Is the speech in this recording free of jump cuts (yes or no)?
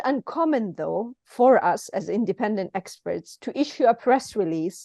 yes